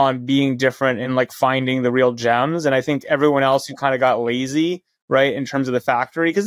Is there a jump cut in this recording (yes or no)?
yes